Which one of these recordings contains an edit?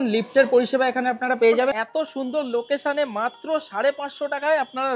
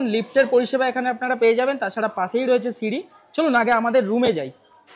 first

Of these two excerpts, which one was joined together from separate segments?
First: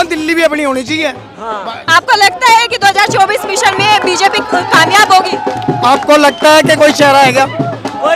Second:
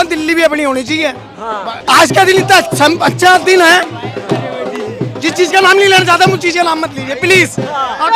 second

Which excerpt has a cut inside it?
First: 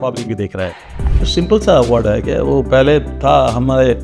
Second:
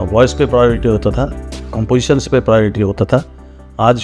first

